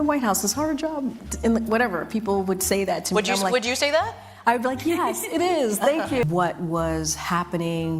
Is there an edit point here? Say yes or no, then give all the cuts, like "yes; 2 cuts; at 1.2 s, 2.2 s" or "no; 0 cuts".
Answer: yes; 1 cut; at 6.2 s